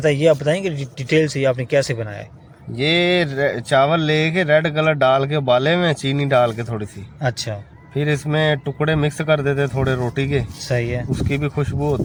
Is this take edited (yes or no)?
no